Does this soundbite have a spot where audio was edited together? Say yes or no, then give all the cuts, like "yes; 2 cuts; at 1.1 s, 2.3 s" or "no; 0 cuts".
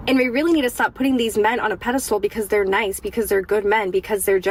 no; 0 cuts